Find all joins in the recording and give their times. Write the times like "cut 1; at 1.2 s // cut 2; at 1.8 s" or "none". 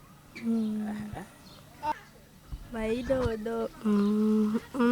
cut 1; at 1.9 s